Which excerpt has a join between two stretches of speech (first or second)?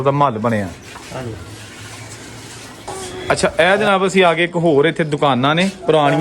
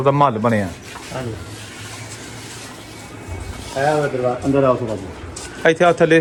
first